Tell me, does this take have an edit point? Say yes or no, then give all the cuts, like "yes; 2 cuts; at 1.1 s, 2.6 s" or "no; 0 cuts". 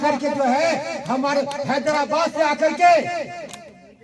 no; 0 cuts